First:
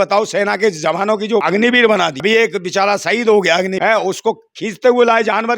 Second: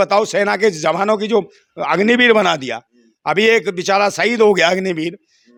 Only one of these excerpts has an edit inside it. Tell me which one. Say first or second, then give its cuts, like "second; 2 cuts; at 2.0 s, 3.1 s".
first; 3 cuts; at 1.4 s, 2.2 s, 3.7 s